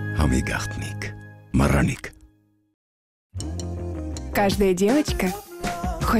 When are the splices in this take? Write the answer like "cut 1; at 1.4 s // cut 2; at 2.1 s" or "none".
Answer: none